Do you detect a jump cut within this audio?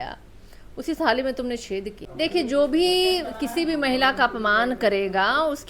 yes; 1 cut; at 2.0 s

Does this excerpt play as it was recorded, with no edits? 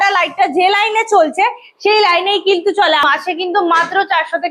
no; 1 cut; at 3.0 s

